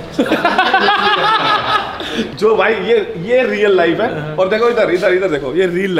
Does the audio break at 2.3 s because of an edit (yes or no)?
yes